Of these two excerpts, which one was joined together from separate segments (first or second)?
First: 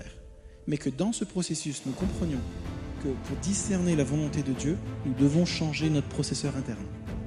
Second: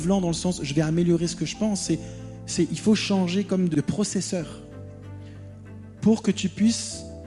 second